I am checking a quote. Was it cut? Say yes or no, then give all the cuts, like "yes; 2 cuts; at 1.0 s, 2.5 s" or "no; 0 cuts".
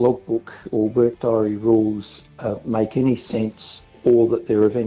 yes; 1 cut; at 4.0 s